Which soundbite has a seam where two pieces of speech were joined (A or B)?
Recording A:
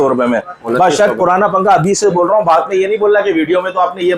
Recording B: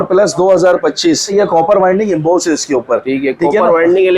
B